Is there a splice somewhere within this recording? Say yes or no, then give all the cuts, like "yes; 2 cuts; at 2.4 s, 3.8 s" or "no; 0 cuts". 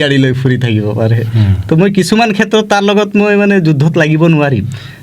no; 0 cuts